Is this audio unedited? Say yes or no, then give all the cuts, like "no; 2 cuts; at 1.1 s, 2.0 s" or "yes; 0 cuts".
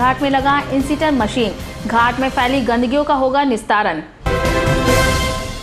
no; 1 cut; at 4.1 s